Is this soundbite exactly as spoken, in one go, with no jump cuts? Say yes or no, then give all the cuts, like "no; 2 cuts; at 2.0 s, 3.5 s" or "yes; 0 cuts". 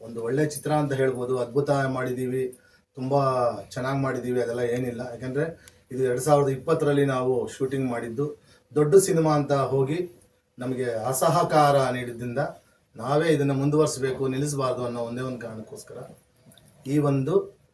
yes; 0 cuts